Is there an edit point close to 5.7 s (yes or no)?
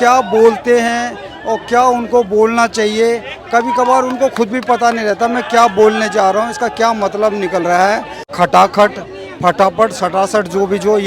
no